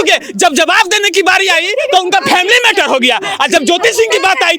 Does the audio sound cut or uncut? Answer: uncut